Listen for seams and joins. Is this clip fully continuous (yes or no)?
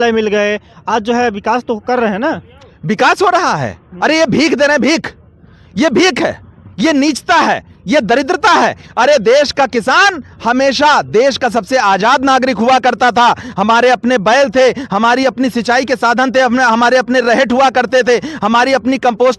yes